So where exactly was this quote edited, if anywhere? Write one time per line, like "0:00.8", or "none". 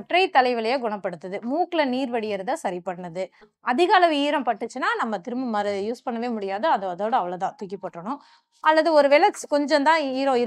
0:03.5